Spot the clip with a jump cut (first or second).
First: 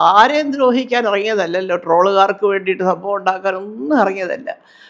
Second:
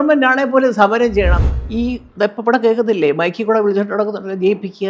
second